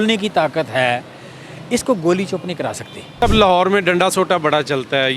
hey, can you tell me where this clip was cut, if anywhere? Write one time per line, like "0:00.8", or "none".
0:03.2